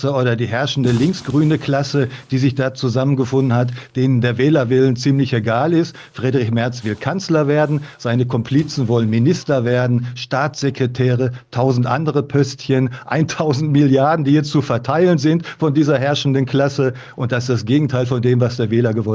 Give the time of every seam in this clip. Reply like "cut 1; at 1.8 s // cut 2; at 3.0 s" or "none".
none